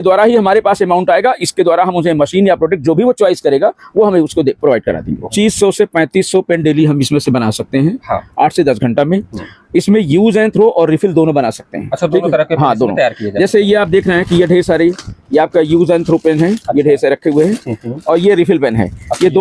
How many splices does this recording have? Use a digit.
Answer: 1